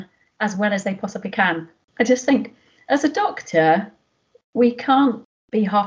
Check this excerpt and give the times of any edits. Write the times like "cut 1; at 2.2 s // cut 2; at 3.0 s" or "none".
cut 1; at 1.8 s